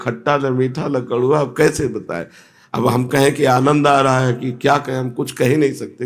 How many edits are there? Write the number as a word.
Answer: zero